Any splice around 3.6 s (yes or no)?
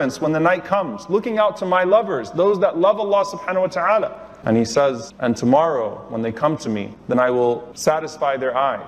no